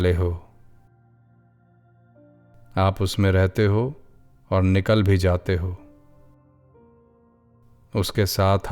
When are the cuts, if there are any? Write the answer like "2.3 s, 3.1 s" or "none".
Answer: 0.8 s, 2.7 s